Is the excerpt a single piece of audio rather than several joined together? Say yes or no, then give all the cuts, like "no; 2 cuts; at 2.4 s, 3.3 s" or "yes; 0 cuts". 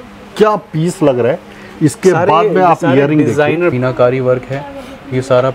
no; 1 cut; at 3.7 s